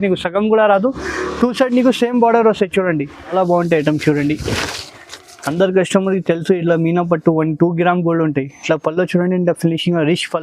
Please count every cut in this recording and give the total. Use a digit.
1